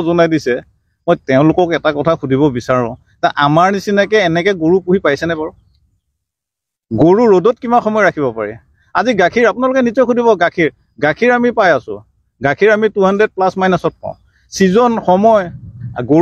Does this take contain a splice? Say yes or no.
no